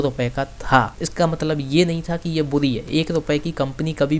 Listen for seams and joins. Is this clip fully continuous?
no; 1 cut; at 1.0 s

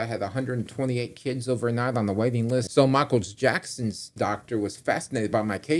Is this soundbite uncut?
no; 1 cut; at 2.7 s

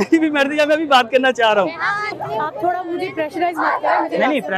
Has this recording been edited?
yes; 1 cut; at 2.2 s

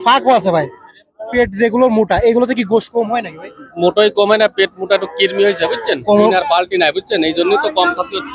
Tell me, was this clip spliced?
yes; 2 cuts; at 1.3 s, 6.0 s

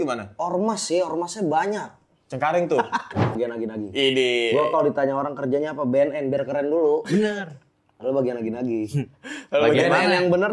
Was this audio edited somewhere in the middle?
yes; 1 cut; at 3.3 s

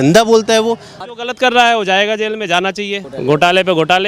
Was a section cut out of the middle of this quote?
yes; 2 cuts; at 1.0 s, 3.1 s

